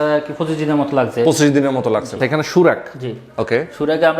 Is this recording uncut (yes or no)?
no